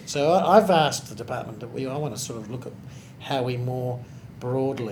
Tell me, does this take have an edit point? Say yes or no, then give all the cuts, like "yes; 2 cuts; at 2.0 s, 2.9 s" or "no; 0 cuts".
no; 0 cuts